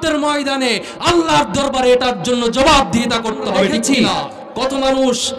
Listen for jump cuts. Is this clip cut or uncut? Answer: cut